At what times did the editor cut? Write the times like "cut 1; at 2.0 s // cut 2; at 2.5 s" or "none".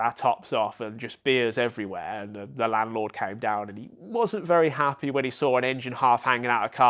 none